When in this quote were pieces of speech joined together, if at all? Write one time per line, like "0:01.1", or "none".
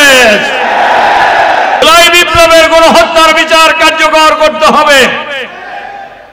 0:01.8